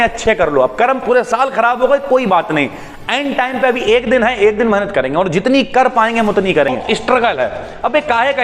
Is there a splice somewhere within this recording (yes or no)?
yes